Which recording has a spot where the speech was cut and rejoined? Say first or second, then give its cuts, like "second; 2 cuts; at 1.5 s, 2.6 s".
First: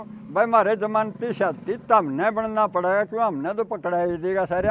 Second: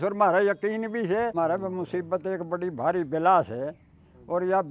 second; 1 cut; at 1.3 s